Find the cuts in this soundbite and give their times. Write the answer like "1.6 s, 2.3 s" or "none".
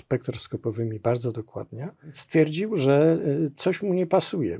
2.2 s